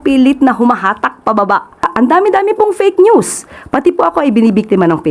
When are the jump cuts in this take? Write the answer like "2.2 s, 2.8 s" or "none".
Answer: 1.9 s